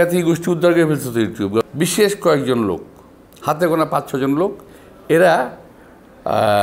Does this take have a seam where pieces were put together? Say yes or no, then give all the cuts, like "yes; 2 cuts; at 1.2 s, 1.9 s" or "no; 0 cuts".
yes; 1 cut; at 1.6 s